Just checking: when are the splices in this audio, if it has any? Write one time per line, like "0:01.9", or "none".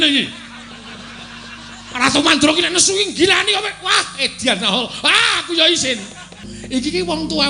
0:06.5

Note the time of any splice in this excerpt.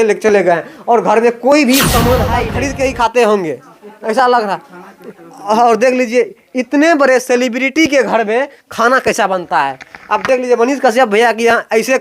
0:02.5

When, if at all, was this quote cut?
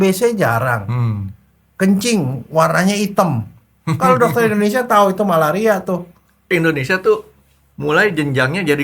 0:06.5

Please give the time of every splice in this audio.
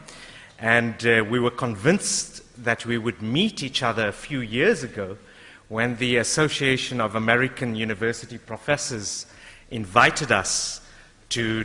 0:07.2

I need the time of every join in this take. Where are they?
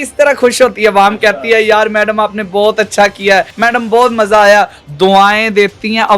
0:03.5

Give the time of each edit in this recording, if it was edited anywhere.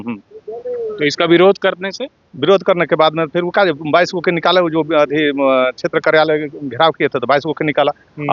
none

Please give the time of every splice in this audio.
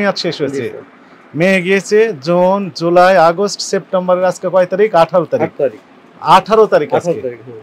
none

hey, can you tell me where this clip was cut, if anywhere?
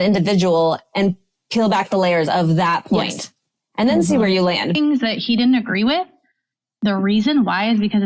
0:04.7

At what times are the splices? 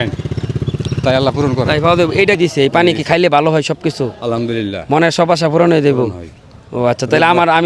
0:02.4

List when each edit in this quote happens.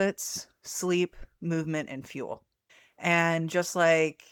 none

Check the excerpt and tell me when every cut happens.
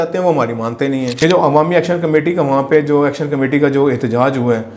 0:01.1

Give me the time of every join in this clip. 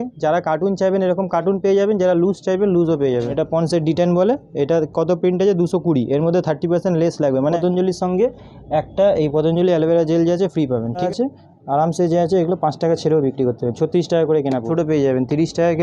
0:03.3
0:07.6
0:11.1
0:14.7

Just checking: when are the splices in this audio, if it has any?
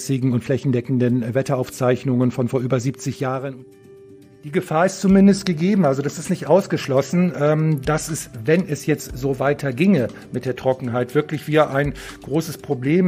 0:04.2

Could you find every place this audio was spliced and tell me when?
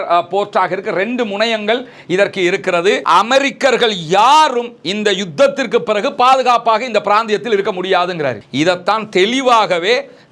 0:03.0

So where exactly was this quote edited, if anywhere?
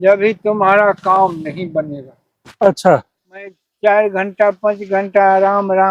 0:03.7

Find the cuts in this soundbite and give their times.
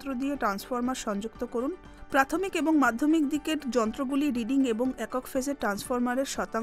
0:01.9

